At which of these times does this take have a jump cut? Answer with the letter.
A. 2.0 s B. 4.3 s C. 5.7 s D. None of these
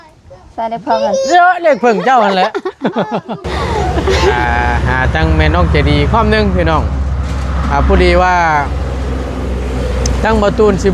B